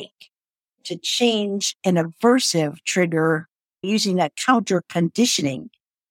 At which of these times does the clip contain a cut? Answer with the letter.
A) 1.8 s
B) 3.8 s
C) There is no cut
B